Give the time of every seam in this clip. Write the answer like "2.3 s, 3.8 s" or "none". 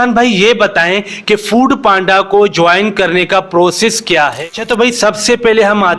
4.4 s